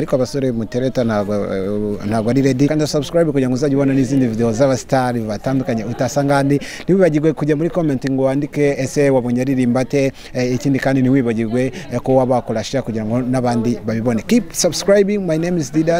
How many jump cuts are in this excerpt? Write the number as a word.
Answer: one